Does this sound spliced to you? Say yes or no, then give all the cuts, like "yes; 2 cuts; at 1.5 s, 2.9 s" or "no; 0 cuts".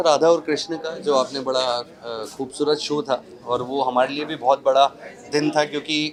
no; 0 cuts